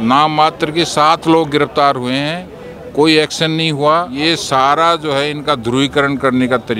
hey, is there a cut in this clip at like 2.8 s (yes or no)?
no